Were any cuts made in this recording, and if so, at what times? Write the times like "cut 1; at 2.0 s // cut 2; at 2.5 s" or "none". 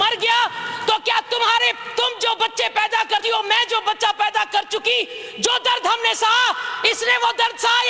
none

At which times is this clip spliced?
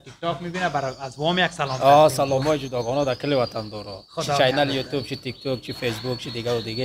none

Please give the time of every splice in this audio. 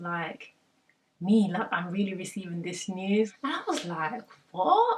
cut 1; at 3.3 s

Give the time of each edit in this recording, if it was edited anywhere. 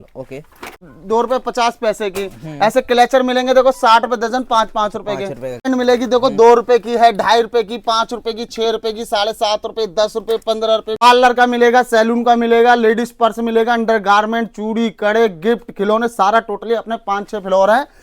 cut 1; at 0.8 s // cut 2; at 5.7 s // cut 3; at 11.0 s

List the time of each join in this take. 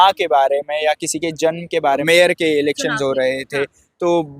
cut 1; at 2.0 s

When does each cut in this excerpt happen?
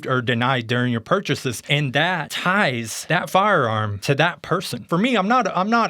cut 1; at 1.9 s // cut 2; at 2.9 s // cut 3; at 3.9 s // cut 4; at 4.8 s

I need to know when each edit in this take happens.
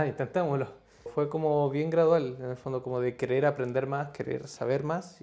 cut 1; at 1.1 s

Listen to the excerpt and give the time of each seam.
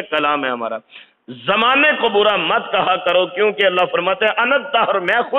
none

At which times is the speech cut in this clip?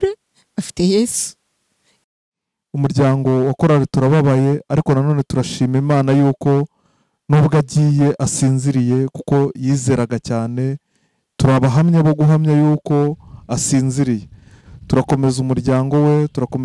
cut 1; at 2.0 s

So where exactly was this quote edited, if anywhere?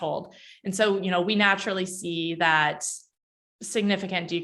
none

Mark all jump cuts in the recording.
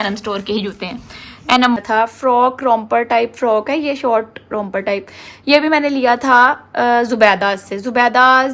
cut 1; at 1.8 s

